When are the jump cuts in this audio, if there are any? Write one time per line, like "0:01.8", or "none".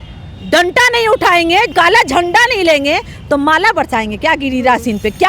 0:01.7